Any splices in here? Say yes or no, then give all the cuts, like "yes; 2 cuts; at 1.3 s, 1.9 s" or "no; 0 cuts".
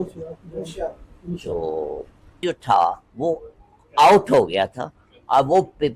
yes; 1 cut; at 2.4 s